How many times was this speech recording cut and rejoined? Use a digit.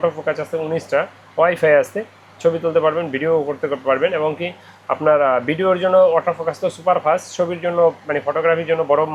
0